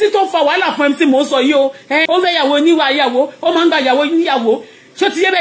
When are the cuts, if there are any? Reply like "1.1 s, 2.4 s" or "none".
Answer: 2.0 s